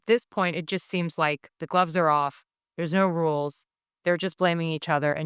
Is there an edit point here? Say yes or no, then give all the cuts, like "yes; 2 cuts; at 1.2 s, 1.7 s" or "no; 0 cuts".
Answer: no; 0 cuts